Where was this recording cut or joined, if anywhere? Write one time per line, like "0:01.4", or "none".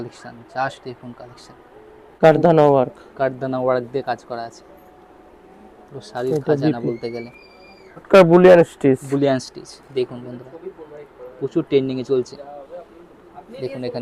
0:02.2
0:08.1